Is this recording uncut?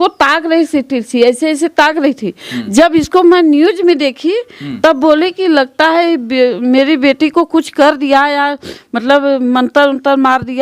yes; 0 cuts

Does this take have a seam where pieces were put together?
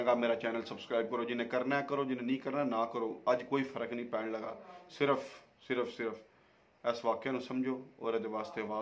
no; 0 cuts

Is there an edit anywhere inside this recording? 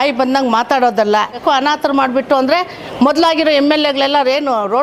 yes; 1 cut; at 1.4 s

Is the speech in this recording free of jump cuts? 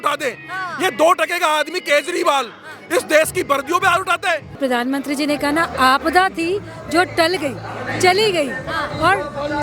no; 1 cut; at 4.5 s

